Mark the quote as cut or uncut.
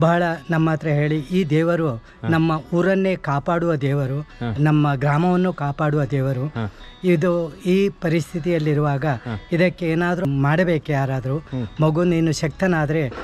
cut